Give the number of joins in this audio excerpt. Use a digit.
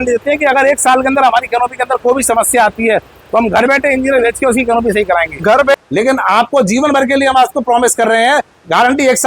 1